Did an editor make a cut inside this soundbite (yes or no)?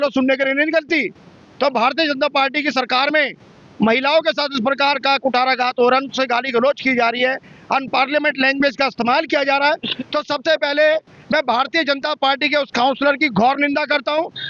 no